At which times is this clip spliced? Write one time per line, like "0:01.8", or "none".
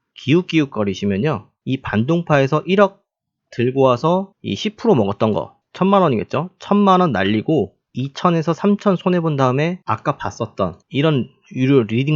0:09.8

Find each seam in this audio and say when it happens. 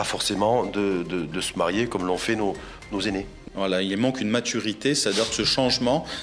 0:03.3

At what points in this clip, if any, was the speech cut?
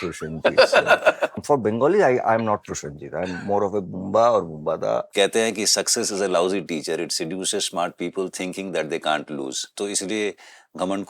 0:01.4
0:05.1
0:09.7

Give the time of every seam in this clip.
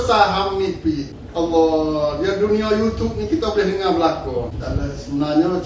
0:01.2
0:04.6

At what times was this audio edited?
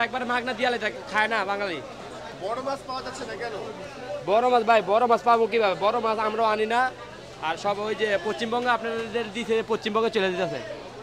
none

